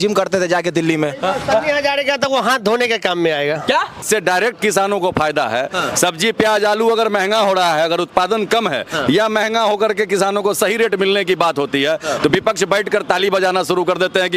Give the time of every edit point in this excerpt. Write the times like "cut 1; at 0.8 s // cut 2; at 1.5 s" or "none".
cut 1; at 4.0 s